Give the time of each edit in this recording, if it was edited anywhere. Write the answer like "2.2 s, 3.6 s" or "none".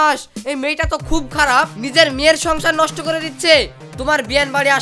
3.8 s